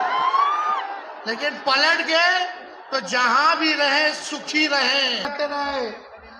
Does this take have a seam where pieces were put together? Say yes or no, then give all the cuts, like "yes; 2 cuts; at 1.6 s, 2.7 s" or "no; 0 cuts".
yes; 1 cut; at 5.3 s